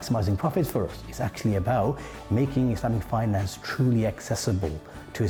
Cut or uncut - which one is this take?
uncut